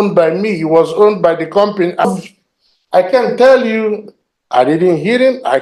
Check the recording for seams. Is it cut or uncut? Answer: cut